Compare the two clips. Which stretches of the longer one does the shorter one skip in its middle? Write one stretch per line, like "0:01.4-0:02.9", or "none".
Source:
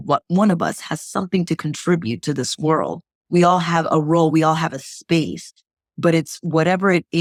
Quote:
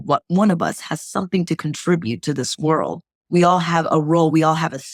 none